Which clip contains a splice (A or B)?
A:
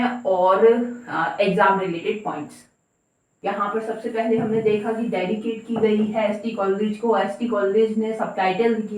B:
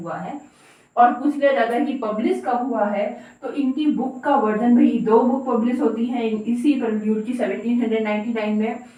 A